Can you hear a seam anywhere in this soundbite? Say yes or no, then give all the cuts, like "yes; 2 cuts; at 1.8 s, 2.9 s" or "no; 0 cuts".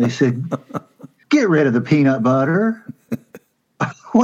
yes; 1 cut; at 1.2 s